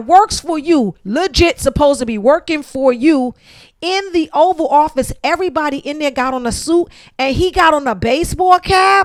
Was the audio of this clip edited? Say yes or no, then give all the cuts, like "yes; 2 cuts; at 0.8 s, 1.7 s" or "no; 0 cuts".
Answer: no; 0 cuts